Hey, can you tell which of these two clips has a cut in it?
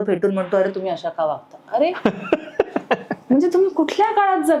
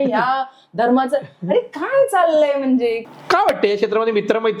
second; 1 cut; at 3.0 s

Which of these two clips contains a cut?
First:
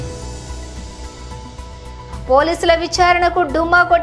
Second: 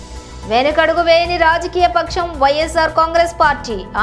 first; 2 cuts; at 1.2 s, 2.2 s

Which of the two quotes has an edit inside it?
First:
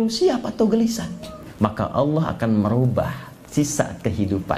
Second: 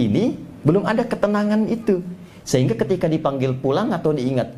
first; 1 cut; at 1.4 s

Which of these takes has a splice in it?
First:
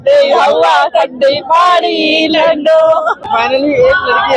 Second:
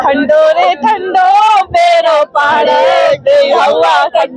first; 1 cut; at 3.3 s

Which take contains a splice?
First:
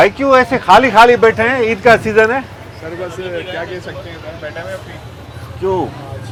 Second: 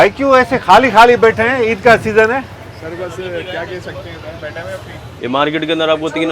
second; 1 cut; at 5.2 s

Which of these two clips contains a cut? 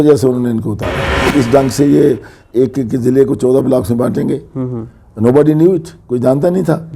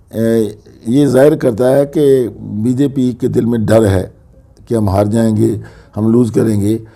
first; 1 cut; at 1.1 s

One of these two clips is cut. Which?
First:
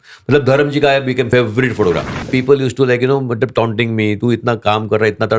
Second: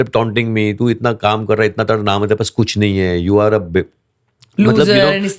first; 2 cuts; at 1.3 s, 2.3 s

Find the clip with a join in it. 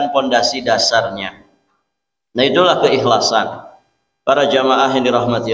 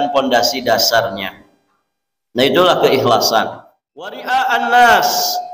second; 1 cut; at 4.1 s

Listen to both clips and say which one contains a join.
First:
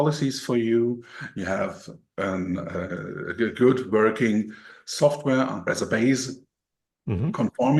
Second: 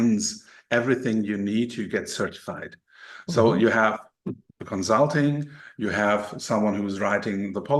first; 1 cut; at 5.7 s

